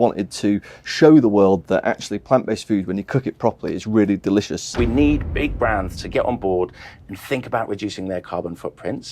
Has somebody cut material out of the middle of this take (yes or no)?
yes